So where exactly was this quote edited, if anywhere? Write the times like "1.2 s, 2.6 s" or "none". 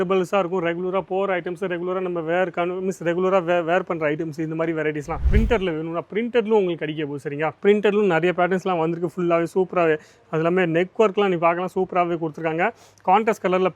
5.3 s